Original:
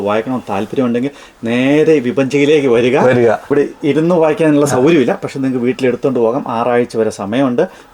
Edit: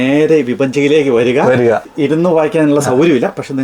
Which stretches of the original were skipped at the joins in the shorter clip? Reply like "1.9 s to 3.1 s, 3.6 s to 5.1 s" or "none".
3.4 s to 3.7 s